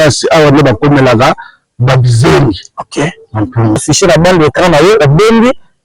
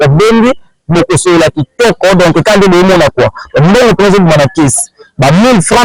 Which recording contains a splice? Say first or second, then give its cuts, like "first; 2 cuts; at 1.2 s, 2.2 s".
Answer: first; 1 cut; at 3.8 s